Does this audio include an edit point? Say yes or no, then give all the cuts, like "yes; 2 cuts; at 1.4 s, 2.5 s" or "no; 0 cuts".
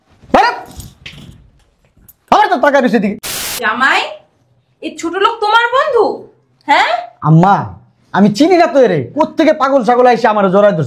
yes; 1 cut; at 3.5 s